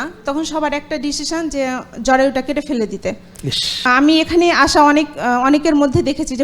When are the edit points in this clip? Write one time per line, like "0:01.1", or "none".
0:03.8

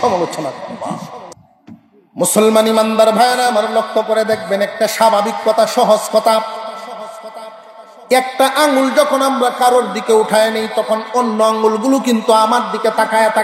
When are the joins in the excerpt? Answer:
0:01.3

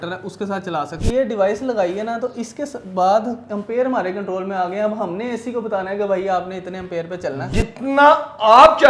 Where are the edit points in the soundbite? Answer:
0:01.0
0:07.5

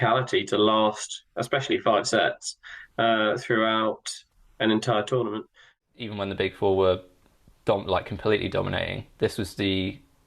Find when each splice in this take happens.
0:05.7

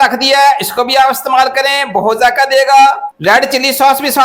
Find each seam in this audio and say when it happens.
0:03.1

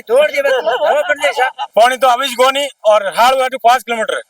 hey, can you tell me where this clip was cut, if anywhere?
0:01.6

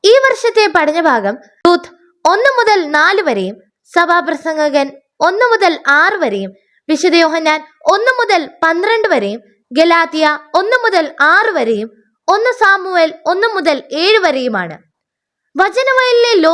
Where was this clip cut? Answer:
0:01.6

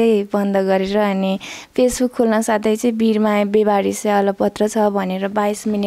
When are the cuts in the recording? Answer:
none

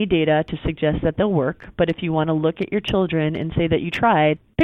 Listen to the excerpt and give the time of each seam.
none

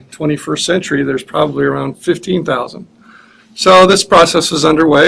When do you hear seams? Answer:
0:02.0

